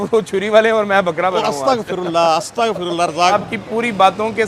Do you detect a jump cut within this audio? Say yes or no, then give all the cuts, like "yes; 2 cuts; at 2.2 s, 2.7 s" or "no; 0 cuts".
yes; 1 cut; at 3.3 s